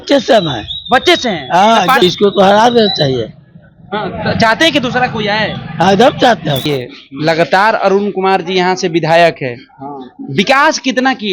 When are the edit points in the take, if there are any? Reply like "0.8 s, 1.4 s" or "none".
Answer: 2.0 s, 6.7 s